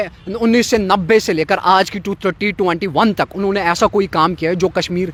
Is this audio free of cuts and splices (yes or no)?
yes